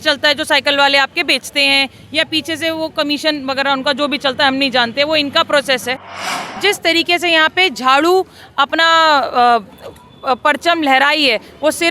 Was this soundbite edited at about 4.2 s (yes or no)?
no